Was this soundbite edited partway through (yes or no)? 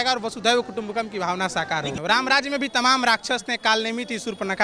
yes